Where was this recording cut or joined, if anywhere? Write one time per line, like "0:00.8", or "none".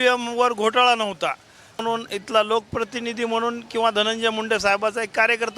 0:01.8

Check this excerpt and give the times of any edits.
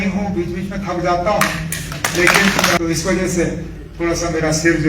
0:02.8

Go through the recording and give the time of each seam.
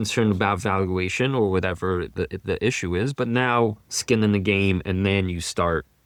none

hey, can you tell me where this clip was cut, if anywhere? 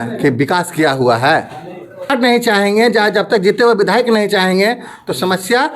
0:02.1

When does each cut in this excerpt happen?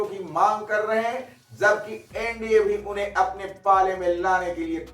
none

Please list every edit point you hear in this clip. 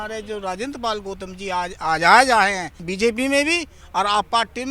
0:02.9

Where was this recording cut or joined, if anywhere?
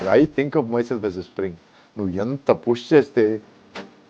none

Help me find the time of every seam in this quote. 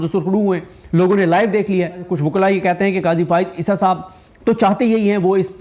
0:02.1

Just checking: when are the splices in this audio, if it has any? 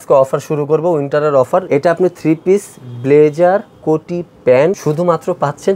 0:01.7
0:04.8

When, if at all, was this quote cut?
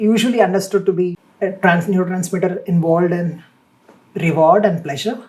0:01.2

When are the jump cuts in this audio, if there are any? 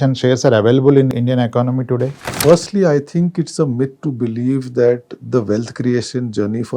0:01.1
0:02.3

